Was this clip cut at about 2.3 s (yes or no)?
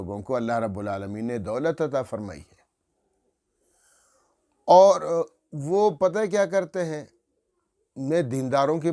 no